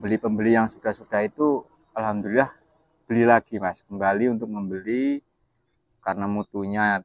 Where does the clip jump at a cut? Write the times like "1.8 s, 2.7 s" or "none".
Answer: none